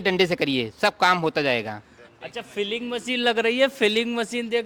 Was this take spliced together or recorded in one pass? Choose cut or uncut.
uncut